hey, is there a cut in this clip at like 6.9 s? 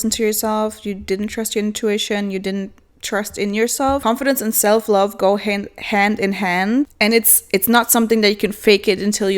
yes; 2 cuts; at 4.0 s, 6.9 s

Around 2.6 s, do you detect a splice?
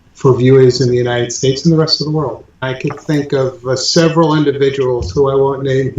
yes; 1 cut; at 2.6 s

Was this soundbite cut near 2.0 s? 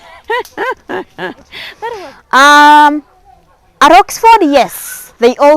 yes; 1 cut; at 2.0 s

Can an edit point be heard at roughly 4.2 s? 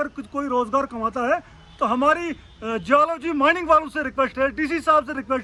no; 0 cuts

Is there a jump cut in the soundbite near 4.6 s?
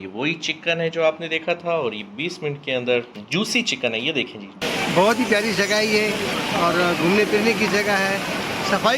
yes; 1 cut; at 4.6 s

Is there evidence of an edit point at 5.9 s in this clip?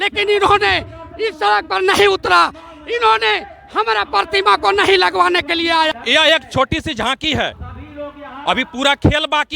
yes; 1 cut; at 5.9 s

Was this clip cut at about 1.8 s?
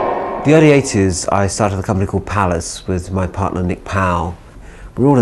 yes; 1 cut; at 1.8 s

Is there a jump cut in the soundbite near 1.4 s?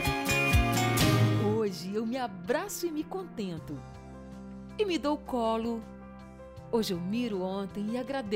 yes; 1 cut; at 1.4 s

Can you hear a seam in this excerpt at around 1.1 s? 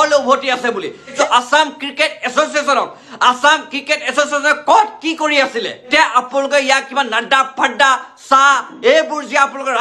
yes; 2 cuts; at 1.1 s, 5.9 s

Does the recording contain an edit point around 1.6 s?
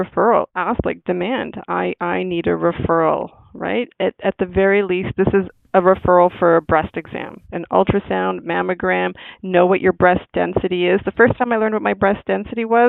no; 0 cuts

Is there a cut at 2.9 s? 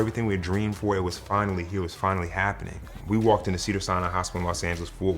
yes; 1 cut; at 2.9 s

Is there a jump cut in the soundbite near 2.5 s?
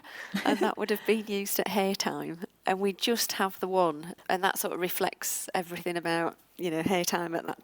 yes; 2 cuts; at 2.5 s, 4.1 s

